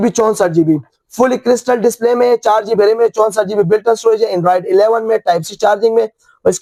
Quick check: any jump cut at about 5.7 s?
no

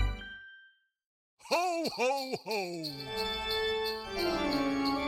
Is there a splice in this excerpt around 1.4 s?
yes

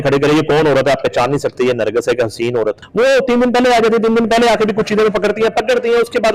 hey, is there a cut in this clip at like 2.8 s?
yes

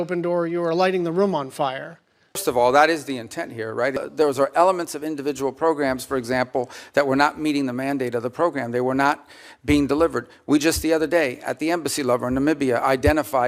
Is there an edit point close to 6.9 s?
no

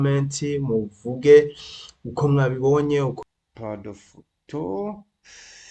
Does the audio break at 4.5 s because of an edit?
no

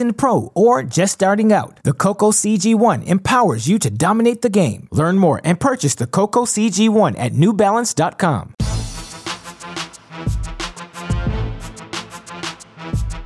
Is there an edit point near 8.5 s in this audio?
yes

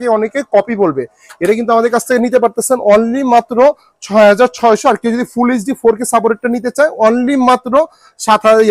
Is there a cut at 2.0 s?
no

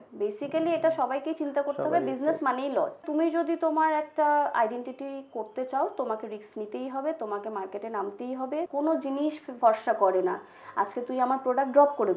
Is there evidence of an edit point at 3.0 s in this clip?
yes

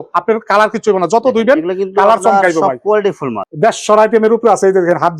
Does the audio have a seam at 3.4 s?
yes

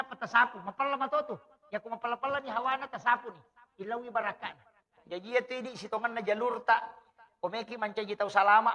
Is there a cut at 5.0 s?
yes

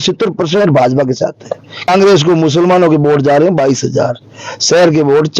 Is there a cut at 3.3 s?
no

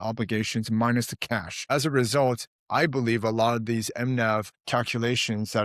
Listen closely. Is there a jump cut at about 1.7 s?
yes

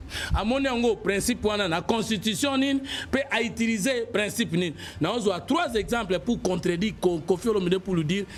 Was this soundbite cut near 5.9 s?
no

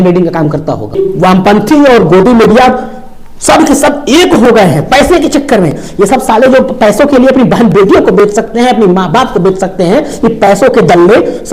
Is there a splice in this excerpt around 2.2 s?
no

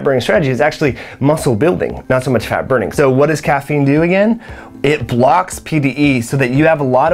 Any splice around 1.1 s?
no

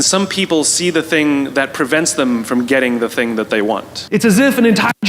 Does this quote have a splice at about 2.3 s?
no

